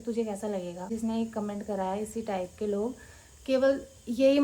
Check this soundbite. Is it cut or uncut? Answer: cut